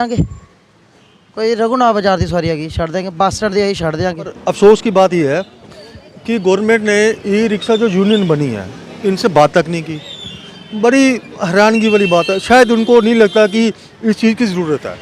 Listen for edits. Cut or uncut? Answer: cut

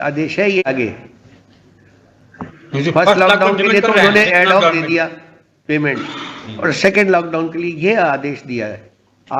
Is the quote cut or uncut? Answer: uncut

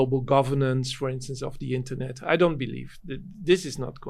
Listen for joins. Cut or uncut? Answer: uncut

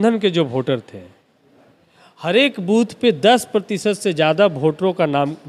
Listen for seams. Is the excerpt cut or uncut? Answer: uncut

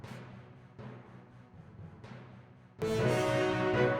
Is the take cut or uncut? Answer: cut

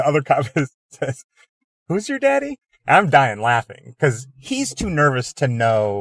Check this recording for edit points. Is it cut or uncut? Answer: uncut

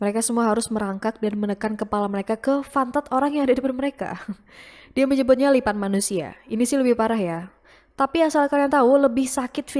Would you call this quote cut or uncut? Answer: uncut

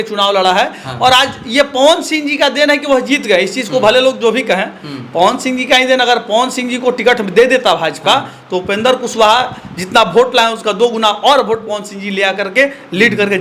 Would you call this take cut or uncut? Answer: uncut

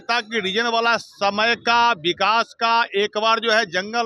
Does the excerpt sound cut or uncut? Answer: uncut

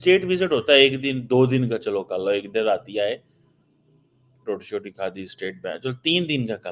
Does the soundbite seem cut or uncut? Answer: uncut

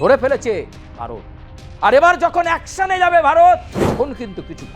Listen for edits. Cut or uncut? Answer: cut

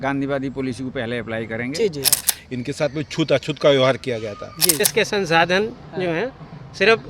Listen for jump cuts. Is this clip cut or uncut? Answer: cut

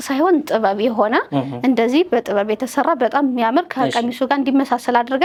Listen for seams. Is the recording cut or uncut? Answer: uncut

